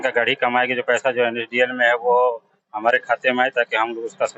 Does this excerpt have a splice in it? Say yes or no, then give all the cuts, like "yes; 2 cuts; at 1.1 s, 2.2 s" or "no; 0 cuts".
no; 0 cuts